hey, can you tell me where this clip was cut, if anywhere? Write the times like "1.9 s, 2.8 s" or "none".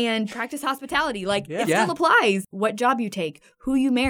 2.5 s